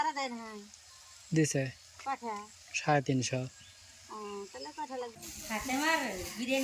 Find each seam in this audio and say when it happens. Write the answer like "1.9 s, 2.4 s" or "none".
5.2 s